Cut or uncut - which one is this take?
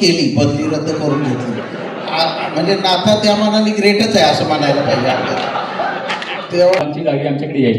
cut